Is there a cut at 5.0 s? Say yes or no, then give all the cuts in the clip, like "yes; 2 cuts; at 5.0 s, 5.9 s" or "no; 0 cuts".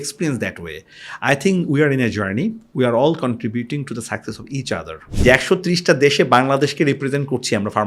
yes; 1 cut; at 5.0 s